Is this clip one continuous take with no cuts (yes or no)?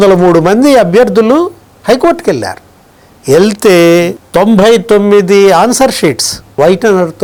yes